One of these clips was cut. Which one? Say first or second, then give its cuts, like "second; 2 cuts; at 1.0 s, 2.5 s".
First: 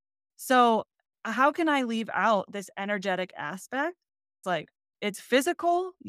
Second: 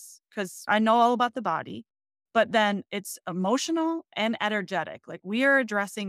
first; 2 cuts; at 1.1 s, 4.4 s